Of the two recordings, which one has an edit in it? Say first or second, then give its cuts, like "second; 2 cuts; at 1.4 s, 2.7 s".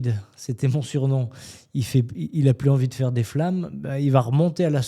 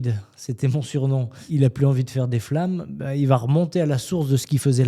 second; 1 cut; at 1.4 s